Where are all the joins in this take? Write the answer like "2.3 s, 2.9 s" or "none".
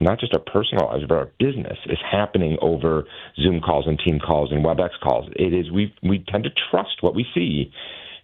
none